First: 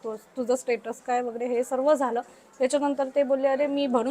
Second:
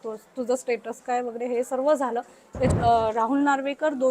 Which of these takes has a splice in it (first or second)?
second